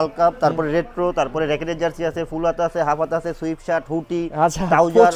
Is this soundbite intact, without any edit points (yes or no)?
yes